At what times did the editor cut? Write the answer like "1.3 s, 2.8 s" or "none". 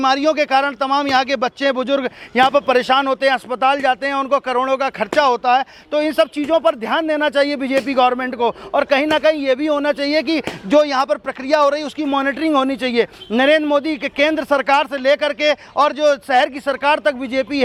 none